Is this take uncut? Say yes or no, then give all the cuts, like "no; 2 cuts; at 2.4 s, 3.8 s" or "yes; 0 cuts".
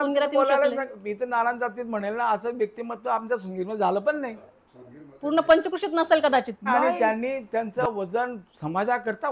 no; 1 cut; at 6.8 s